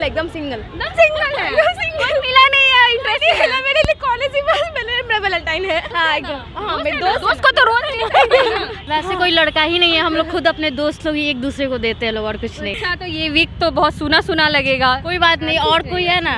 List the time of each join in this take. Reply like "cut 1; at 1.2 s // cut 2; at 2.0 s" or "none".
cut 1; at 5.9 s // cut 2; at 8.8 s // cut 3; at 12.8 s